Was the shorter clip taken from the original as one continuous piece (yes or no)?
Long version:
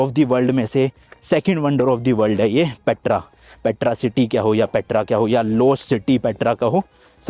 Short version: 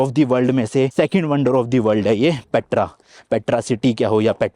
no